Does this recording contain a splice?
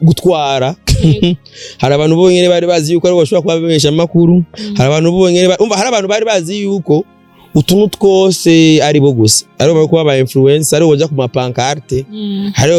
no; 0 cuts

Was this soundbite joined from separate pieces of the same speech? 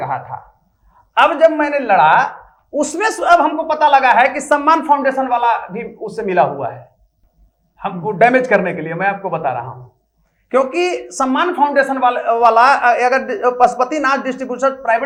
no; 0 cuts

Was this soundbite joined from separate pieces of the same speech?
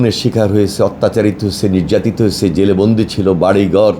no; 0 cuts

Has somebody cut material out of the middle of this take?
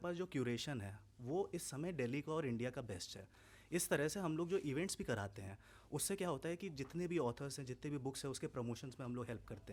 no; 0 cuts

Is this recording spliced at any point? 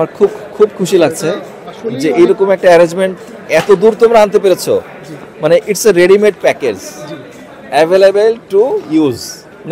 no; 0 cuts

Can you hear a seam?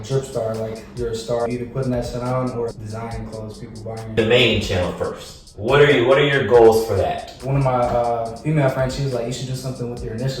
yes; 4 cuts; at 1.5 s, 2.7 s, 4.2 s, 7.3 s

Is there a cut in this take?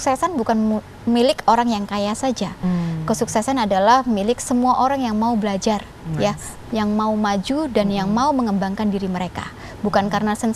no; 0 cuts

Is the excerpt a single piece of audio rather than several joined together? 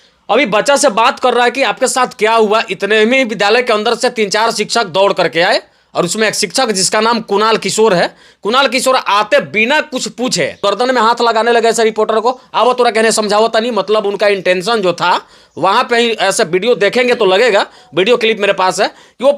no; 1 cut; at 10.6 s

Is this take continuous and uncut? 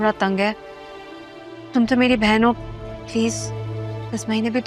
yes; 0 cuts

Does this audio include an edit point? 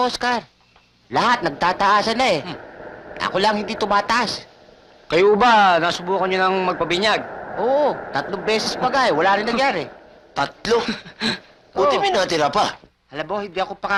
no; 0 cuts

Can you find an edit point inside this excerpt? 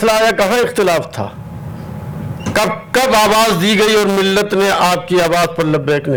no; 0 cuts

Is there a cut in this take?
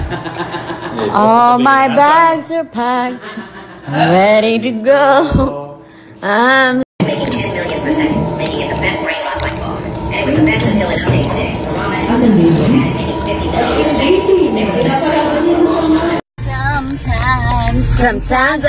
yes; 2 cuts; at 6.9 s, 16.4 s

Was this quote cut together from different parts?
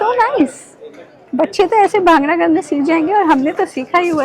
no; 0 cuts

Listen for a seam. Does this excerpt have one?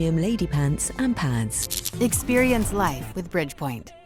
no; 0 cuts

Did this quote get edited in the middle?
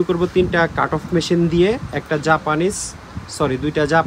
no; 0 cuts

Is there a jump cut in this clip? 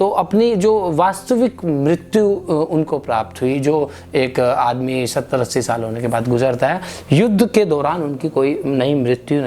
no; 0 cuts

